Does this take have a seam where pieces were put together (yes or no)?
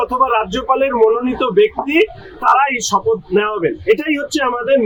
no